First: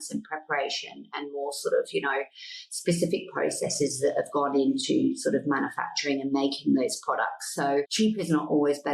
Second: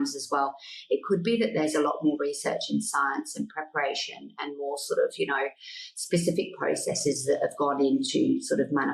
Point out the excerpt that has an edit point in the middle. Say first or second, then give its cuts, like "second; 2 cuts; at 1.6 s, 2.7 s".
first; 1 cut; at 7.9 s